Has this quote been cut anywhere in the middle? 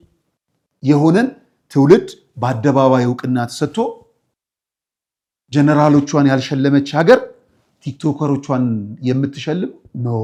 no; 0 cuts

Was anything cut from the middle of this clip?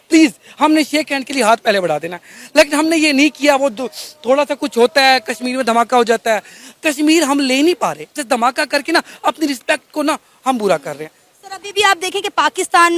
no; 0 cuts

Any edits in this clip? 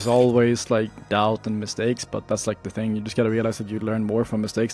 yes; 1 cut; at 1.0 s

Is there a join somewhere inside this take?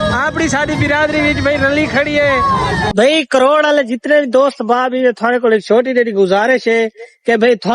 yes; 1 cut; at 2.9 s

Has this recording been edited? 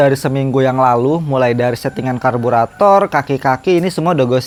no; 0 cuts

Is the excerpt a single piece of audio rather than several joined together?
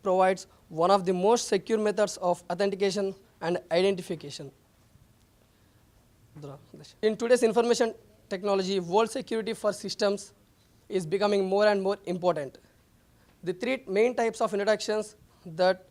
yes; 0 cuts

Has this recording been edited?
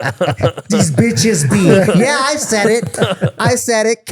no; 0 cuts

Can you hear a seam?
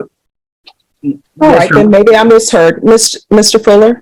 no; 0 cuts

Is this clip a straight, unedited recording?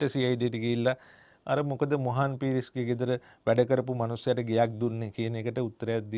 yes; 0 cuts

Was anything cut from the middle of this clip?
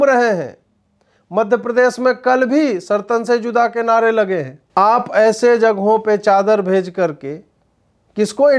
yes; 1 cut; at 4.6 s

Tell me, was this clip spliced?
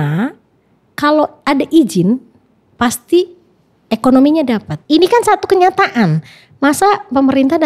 yes; 1 cut; at 4.7 s

